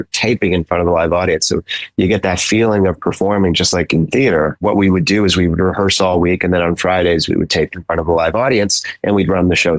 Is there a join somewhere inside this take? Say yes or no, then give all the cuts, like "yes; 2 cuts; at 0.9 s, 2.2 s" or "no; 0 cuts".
no; 0 cuts